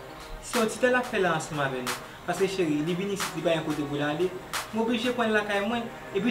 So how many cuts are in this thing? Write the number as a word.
zero